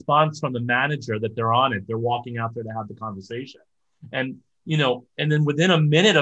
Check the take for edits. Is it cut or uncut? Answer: uncut